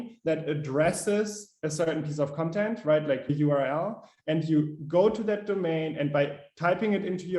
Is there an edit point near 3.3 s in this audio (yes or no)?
yes